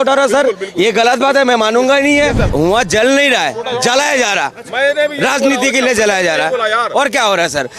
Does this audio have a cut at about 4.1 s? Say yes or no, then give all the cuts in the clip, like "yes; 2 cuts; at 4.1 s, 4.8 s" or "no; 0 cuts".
no; 1 cut; at 2.5 s